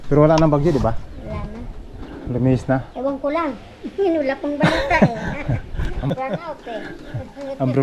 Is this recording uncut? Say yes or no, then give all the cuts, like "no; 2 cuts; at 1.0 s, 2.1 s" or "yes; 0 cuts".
no; 1 cut; at 6.1 s